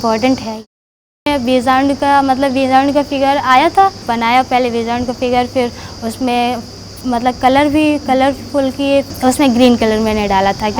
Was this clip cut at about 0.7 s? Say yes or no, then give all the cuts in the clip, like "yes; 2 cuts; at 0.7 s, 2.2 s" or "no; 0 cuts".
yes; 3 cuts; at 0.7 s, 4.0 s, 9.1 s